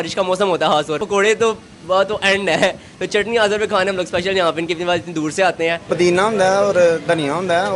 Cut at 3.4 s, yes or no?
no